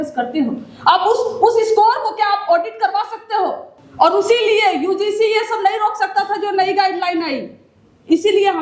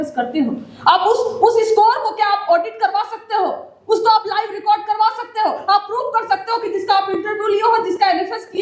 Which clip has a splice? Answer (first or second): first